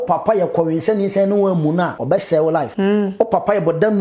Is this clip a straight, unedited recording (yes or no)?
no